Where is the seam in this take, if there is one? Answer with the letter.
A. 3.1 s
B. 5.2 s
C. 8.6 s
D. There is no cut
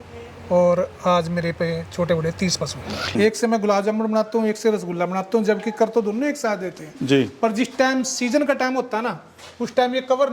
A